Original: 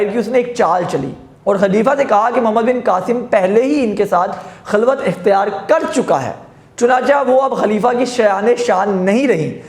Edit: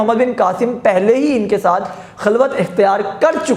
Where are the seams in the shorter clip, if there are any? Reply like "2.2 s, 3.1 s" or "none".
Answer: none